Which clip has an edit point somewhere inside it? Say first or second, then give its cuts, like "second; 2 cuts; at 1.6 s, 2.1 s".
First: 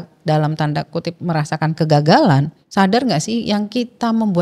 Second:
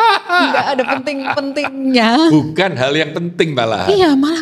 first; 1 cut; at 2.6 s